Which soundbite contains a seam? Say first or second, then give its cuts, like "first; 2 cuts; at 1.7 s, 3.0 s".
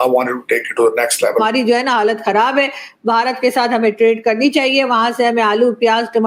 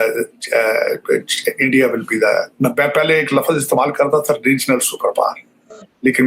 first; 1 cut; at 1.4 s